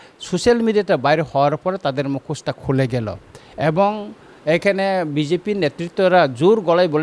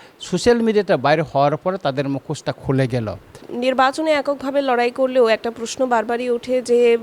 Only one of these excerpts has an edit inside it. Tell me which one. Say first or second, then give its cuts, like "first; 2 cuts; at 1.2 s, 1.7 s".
second; 1 cut; at 3.5 s